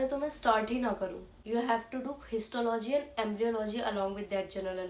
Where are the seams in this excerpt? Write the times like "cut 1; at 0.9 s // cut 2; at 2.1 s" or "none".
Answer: cut 1; at 1.4 s